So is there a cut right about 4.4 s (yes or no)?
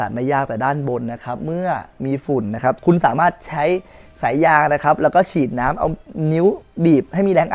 no